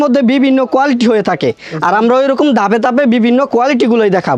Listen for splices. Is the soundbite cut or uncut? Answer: uncut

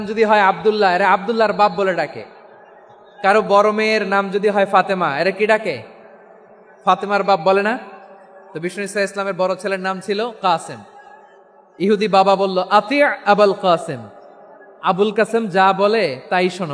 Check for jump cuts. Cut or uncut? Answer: uncut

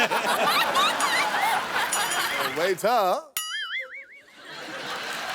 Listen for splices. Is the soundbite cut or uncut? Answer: cut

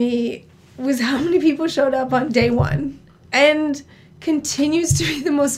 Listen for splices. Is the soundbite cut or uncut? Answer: cut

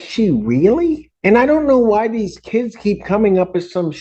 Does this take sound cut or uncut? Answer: cut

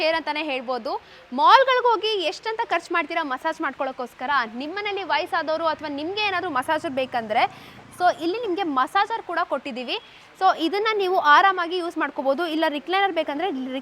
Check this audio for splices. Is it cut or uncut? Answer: uncut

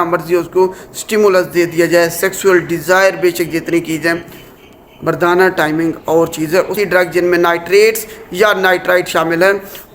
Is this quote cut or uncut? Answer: cut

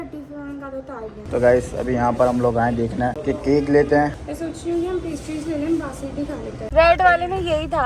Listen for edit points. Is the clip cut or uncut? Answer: cut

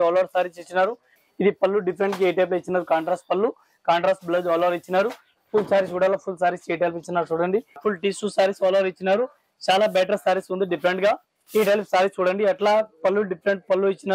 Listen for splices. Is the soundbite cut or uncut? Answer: cut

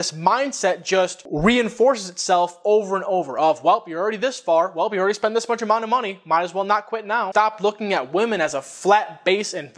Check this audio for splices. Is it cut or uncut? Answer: cut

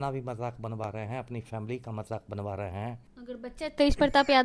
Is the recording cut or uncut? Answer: cut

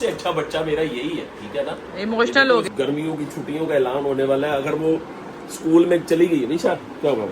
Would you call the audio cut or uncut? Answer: cut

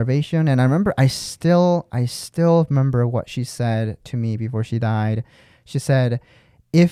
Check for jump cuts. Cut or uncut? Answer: uncut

